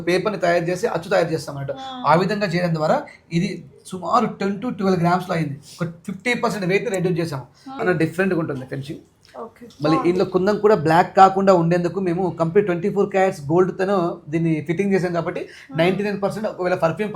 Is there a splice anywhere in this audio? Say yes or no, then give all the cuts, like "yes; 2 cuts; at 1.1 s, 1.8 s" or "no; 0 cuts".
yes; 1 cut; at 7.8 s